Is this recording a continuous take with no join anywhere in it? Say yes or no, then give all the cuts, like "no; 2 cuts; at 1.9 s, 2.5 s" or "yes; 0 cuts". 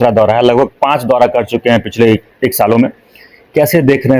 yes; 0 cuts